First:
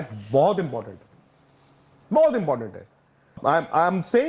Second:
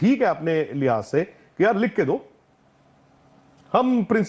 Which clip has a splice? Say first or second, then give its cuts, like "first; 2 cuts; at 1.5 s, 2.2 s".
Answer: first; 1 cut; at 3.3 s